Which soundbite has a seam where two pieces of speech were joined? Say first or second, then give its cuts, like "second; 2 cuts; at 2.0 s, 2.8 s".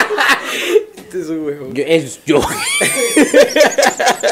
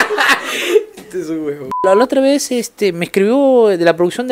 second; 1 cut; at 1.8 s